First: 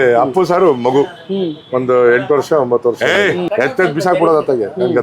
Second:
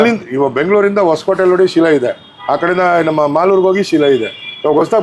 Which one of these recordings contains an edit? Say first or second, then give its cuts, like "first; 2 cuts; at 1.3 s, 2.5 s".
first; 1 cut; at 3.0 s